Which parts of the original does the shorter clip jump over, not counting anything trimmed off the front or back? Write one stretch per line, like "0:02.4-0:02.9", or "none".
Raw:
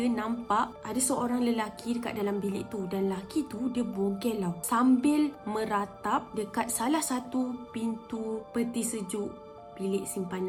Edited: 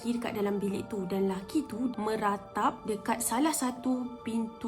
0:03.7-0:05.4